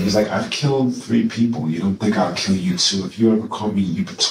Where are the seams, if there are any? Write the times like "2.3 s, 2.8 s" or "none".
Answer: none